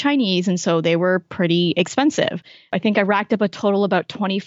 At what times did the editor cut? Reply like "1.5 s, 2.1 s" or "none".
2.7 s